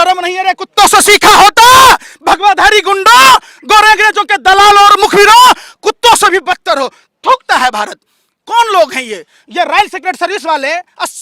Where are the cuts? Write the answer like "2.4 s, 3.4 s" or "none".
none